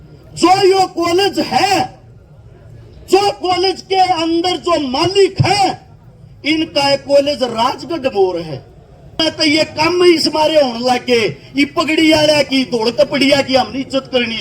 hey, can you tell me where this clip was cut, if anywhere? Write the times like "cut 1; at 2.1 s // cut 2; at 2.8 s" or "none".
cut 1; at 9.2 s